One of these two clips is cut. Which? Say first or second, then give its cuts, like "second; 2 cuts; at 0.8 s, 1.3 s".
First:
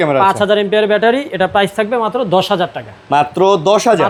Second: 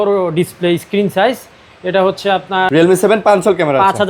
second; 1 cut; at 2.7 s